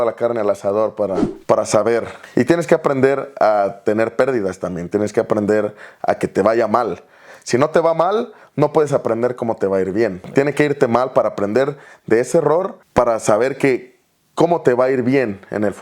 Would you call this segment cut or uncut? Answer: cut